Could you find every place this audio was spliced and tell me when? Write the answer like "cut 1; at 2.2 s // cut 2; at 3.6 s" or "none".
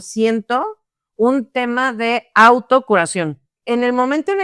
cut 1; at 3.5 s